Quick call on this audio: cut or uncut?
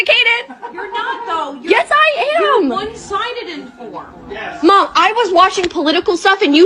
uncut